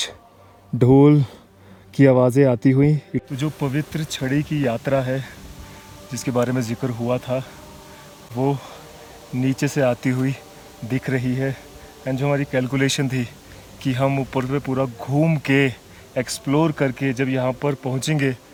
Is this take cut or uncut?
uncut